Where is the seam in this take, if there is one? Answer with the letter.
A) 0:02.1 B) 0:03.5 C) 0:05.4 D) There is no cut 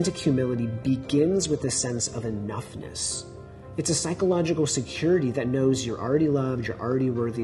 D